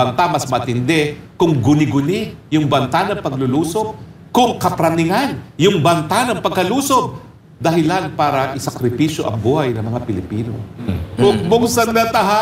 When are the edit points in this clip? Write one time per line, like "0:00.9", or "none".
0:05.7